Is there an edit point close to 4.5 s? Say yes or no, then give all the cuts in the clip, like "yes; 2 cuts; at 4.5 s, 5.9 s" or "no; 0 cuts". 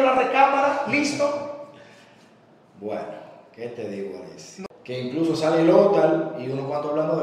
yes; 1 cut; at 4.5 s